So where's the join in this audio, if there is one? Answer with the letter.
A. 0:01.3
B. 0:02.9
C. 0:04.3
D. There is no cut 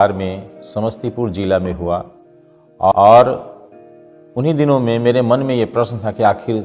B